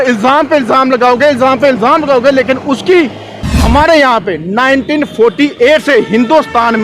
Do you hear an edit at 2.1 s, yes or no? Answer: no